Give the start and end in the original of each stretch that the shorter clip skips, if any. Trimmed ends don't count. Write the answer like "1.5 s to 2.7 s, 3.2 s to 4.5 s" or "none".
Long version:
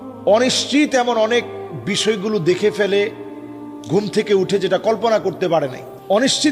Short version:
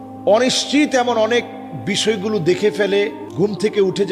3.2 s to 3.7 s